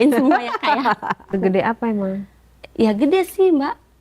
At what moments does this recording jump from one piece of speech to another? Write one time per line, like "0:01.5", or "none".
0:01.3